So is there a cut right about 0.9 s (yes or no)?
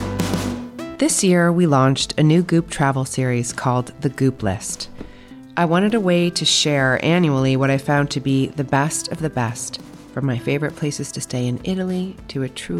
yes